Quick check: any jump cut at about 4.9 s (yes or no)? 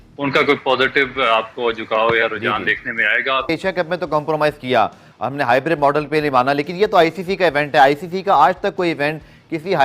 no